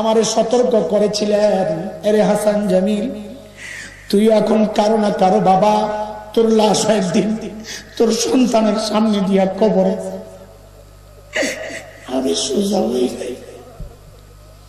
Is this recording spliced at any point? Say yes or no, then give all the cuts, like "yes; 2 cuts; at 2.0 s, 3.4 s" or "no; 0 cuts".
no; 0 cuts